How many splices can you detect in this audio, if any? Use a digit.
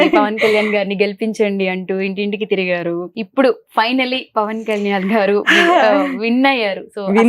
1